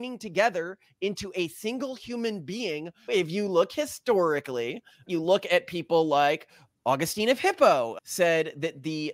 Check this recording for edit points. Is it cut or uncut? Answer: cut